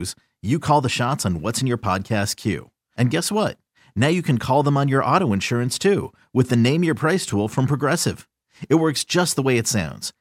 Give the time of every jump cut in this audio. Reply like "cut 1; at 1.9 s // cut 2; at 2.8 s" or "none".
none